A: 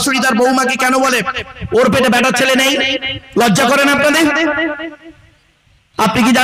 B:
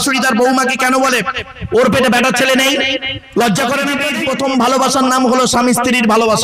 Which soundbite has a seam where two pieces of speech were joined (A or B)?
B